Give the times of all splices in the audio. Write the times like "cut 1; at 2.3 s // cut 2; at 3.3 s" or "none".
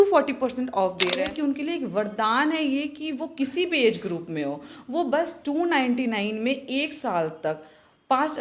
cut 1; at 1.2 s